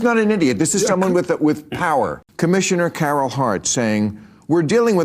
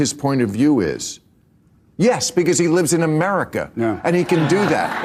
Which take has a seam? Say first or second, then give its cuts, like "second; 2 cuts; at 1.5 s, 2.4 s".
first; 1 cut; at 2.2 s